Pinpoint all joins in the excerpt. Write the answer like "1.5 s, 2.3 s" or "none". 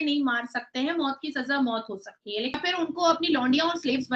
2.6 s